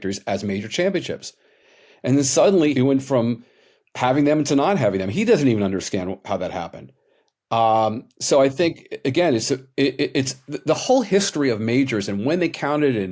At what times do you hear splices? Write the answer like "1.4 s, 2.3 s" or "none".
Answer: 2.7 s